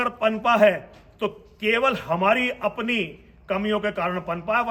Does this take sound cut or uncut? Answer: uncut